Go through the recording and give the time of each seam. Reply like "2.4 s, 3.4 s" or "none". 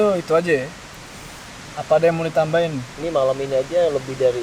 none